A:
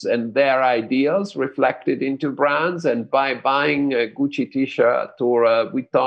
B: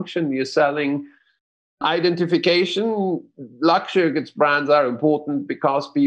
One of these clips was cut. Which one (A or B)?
B